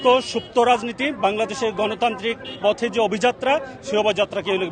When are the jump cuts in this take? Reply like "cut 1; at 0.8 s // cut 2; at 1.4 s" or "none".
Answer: none